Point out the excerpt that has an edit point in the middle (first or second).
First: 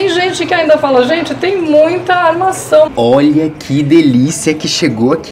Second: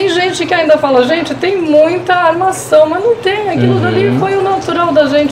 first